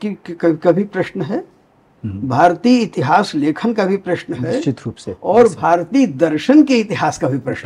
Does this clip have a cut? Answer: no; 0 cuts

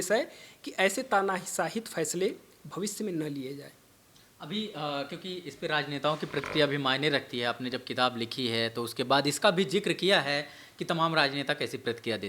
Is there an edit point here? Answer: no; 0 cuts

